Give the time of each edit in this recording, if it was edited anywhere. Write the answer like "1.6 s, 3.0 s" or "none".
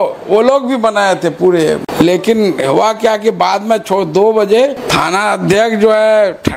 1.9 s, 4.8 s